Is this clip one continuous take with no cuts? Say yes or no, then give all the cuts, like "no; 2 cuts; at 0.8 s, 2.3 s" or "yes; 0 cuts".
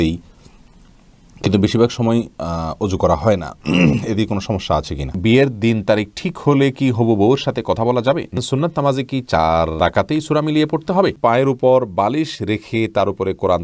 no; 4 cuts; at 5.2 s, 8.3 s, 9.8 s, 11.2 s